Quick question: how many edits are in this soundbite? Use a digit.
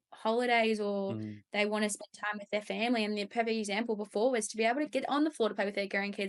0